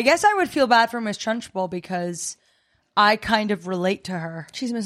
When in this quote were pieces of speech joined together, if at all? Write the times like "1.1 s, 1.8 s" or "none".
none